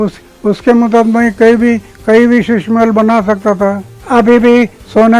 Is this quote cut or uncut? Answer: cut